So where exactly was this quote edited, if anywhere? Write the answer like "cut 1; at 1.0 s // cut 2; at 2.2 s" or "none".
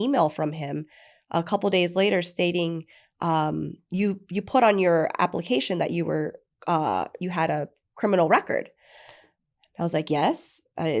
none